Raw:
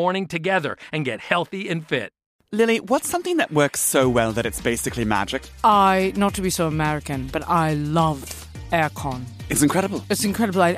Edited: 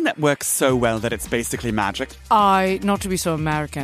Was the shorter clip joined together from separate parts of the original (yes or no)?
no